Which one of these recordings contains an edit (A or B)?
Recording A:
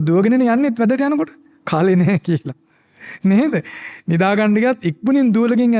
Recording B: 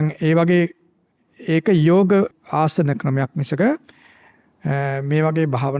B